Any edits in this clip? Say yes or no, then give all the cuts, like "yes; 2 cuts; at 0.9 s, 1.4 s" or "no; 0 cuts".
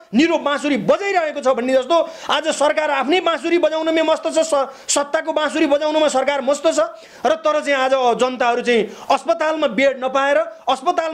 no; 0 cuts